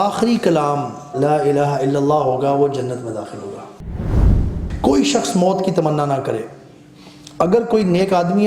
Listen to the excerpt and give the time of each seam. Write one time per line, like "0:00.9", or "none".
0:01.1
0:04.2